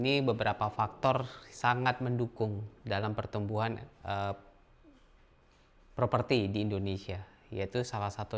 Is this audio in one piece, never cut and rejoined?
yes; 0 cuts

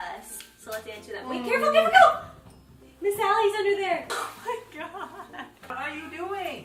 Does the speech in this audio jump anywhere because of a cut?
no; 0 cuts

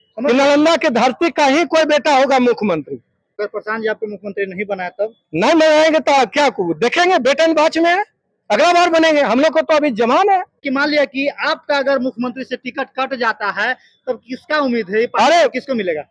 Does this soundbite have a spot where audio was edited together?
yes; 2 cuts; at 3.3 s, 10.7 s

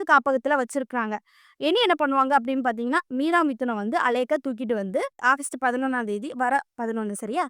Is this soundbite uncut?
no; 1 cut; at 5.2 s

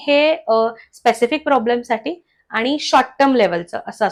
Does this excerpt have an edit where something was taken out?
no; 0 cuts

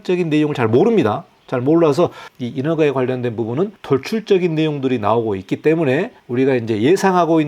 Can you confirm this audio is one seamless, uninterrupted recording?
no; 3 cuts; at 2.3 s, 3.8 s, 6.2 s

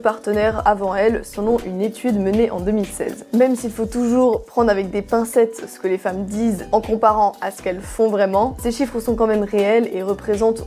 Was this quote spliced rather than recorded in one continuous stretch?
no; 0 cuts

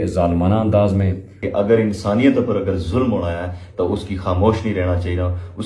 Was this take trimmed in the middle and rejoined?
yes; 1 cut; at 1.4 s

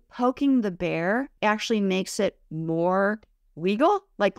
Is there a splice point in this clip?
yes; 1 cut; at 1.3 s

